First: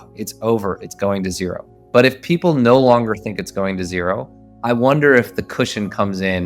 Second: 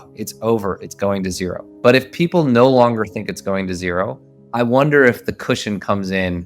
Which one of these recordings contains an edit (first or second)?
second